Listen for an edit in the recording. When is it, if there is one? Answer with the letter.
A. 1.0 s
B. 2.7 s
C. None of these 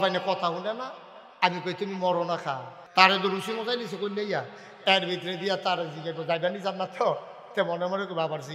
B